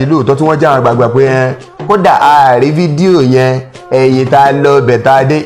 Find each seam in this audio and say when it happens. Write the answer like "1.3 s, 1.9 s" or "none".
none